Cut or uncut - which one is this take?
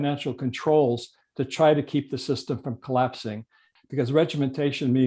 cut